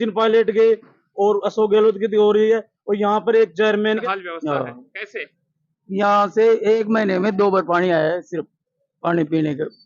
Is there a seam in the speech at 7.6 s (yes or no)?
no